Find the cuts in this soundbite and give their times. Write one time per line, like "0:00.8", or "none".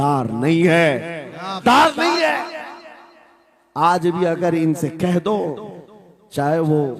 0:01.6